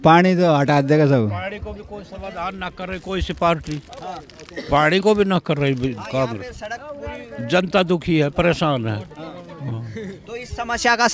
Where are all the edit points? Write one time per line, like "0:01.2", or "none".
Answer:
none